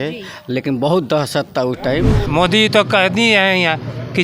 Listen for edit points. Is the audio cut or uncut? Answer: cut